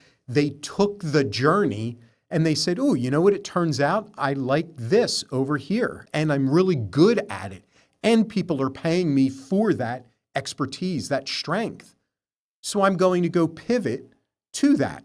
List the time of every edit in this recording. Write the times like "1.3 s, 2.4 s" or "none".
6.0 s